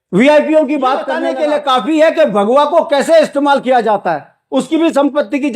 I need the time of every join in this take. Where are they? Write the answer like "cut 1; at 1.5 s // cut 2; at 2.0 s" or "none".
cut 1; at 1.2 s